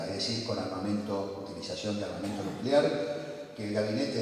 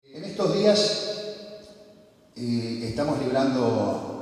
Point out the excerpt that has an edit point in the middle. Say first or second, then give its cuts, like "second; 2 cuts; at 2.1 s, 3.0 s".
first; 1 cut; at 1.8 s